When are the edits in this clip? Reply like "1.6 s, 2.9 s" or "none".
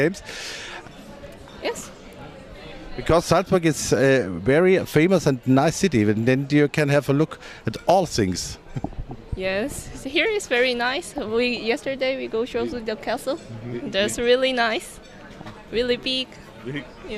14.5 s